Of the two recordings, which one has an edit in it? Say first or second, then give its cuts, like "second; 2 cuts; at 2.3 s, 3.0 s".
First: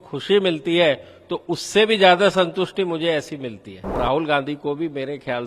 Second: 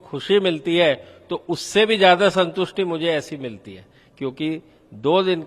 first; 1 cut; at 3.9 s